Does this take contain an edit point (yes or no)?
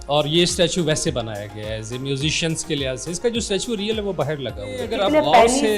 yes